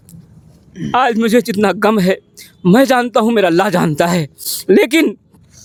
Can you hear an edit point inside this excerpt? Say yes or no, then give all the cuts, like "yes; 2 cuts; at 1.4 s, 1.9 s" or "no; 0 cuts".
no; 0 cuts